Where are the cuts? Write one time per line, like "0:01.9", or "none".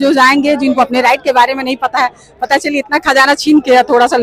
none